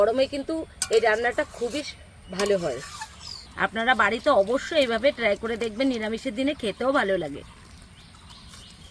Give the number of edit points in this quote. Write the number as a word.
one